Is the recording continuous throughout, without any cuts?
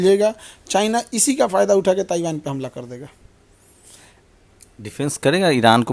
yes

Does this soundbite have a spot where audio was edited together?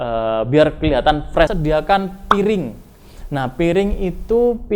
yes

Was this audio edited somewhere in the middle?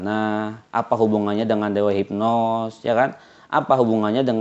no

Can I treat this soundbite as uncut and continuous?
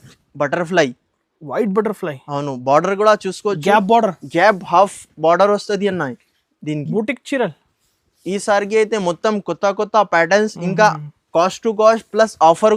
yes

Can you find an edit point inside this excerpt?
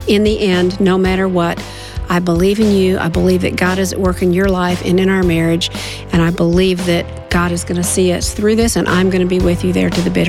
yes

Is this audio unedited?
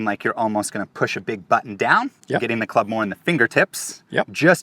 yes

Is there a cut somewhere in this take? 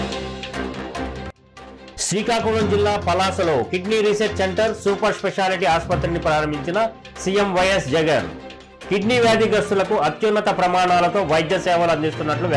yes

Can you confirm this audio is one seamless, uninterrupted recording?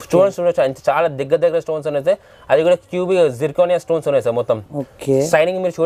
yes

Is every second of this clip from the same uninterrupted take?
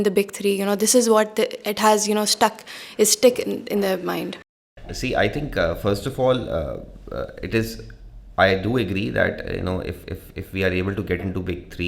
yes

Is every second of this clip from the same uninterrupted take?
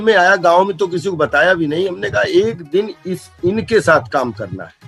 yes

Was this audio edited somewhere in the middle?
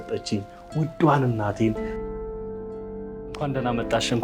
yes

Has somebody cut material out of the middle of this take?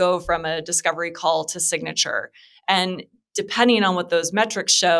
no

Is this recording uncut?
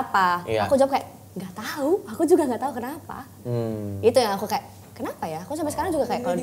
yes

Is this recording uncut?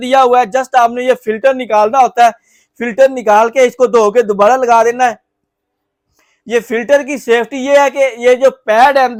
yes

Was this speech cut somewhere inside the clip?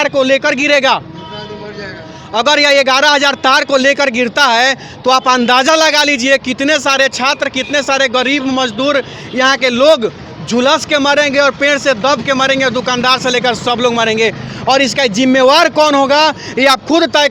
no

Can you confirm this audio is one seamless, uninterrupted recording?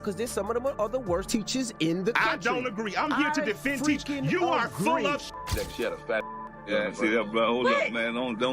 no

